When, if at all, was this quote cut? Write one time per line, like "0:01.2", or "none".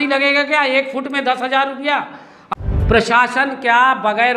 0:02.5